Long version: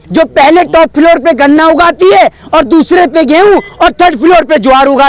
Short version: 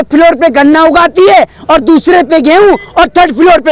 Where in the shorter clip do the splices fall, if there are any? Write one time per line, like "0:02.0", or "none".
none

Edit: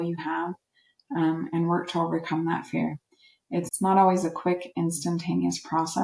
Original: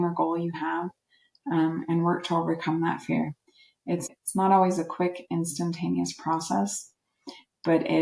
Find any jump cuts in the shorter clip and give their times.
0:03.7

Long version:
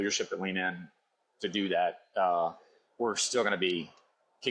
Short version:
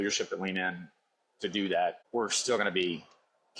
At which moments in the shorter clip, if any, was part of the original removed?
0:02.0

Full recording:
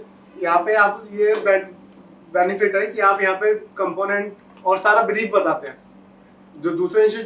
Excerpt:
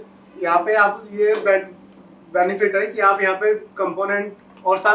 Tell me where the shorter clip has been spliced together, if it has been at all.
none

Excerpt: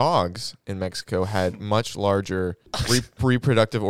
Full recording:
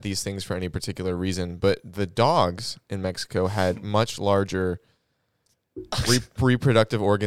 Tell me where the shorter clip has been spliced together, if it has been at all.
0:02.7

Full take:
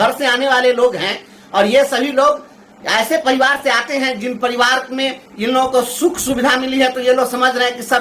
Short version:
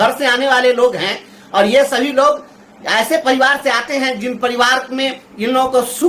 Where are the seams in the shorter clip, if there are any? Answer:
none

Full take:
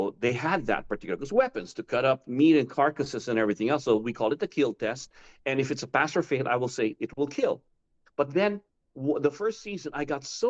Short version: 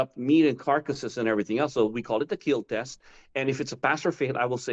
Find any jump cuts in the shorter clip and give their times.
none

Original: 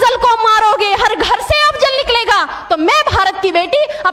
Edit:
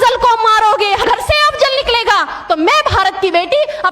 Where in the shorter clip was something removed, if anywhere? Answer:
0:01.0

